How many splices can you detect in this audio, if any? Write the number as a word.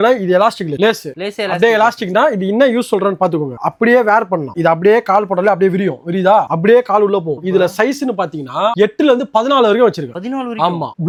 zero